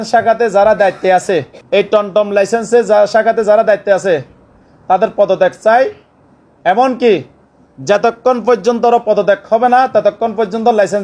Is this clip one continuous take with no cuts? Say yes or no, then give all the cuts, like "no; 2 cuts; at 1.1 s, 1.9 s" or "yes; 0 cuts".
no; 1 cut; at 1.6 s